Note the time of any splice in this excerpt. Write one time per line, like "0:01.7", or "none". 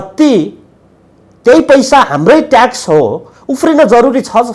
none